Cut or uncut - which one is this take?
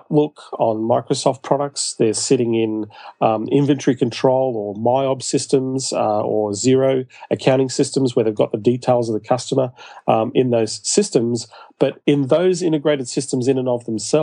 uncut